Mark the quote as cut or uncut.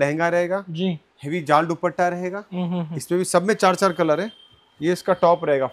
uncut